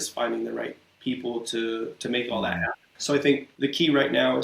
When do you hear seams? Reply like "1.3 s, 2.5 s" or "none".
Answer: 2.8 s, 3.5 s

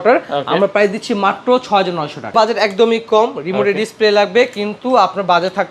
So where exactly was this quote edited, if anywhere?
2.3 s

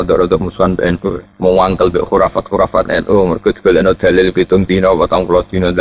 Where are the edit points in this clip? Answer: 1.3 s

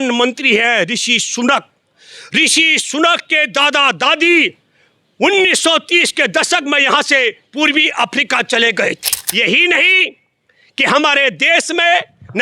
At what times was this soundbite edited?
9.2 s

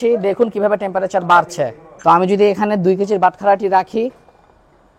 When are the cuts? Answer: 1.8 s

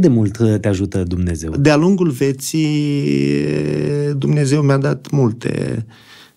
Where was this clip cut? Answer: 1.5 s

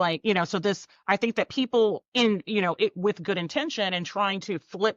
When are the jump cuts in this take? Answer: 0.9 s, 2.0 s

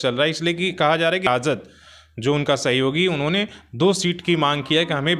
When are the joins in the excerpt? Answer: 1.3 s

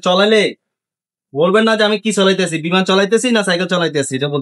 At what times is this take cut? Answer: none

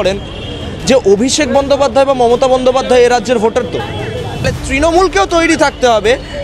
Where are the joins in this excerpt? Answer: 4.5 s

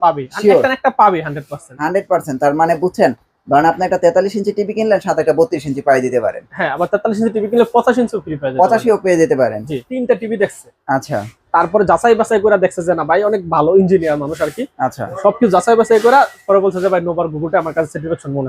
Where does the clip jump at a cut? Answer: 9.9 s

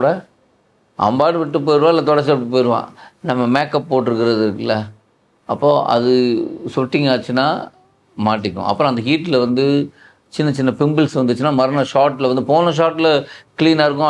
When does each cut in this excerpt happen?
none

